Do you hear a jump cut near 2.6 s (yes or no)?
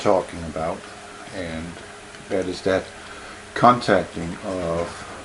yes